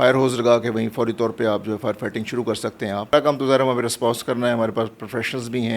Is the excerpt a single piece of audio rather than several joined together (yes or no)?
no